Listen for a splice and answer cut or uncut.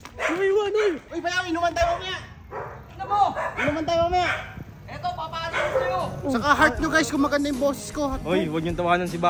cut